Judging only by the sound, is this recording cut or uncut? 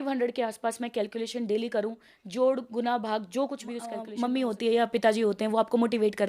cut